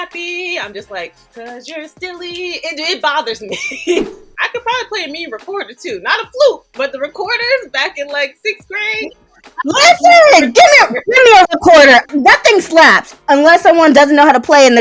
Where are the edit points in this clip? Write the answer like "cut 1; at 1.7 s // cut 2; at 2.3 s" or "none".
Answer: cut 1; at 4.1 s // cut 2; at 12.1 s